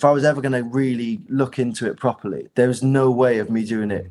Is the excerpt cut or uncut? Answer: cut